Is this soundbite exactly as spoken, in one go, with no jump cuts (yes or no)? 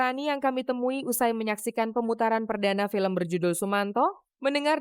yes